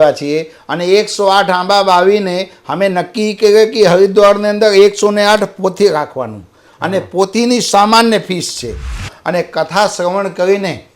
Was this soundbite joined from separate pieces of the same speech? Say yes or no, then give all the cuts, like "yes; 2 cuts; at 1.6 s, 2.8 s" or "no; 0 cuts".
yes; 1 cut; at 9.1 s